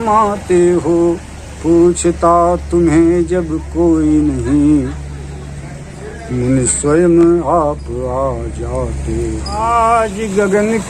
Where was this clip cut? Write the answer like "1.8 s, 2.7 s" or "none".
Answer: 9.6 s